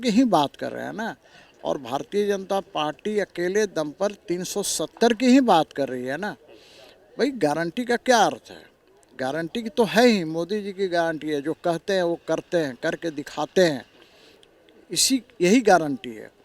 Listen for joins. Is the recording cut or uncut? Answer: uncut